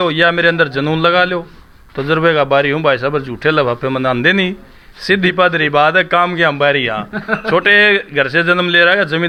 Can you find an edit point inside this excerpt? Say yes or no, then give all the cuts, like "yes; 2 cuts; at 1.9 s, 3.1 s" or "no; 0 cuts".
no; 0 cuts